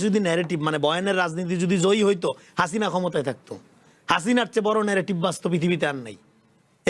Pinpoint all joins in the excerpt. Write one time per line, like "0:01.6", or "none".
none